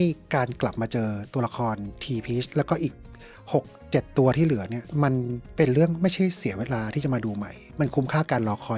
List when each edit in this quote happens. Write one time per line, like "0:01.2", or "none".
0:07.6